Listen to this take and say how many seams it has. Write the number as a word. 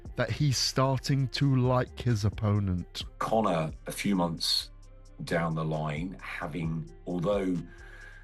one